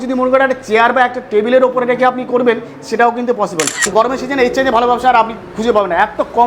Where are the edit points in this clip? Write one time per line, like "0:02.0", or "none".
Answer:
0:03.8

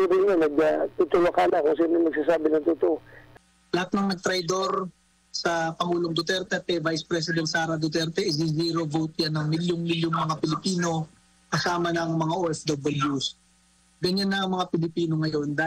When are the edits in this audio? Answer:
0:03.2

